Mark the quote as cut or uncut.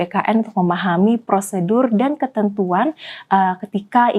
uncut